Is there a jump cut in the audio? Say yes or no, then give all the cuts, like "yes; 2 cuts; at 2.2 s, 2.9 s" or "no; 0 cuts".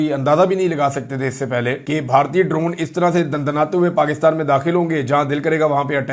yes; 1 cut; at 1.8 s